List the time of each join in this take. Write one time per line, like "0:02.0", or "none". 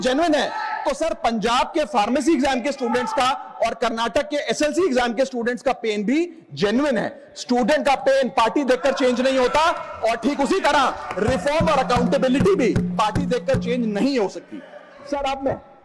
none